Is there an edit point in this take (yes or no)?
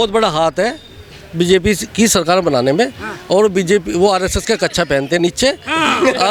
no